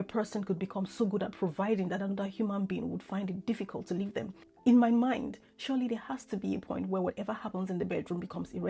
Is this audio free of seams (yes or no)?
no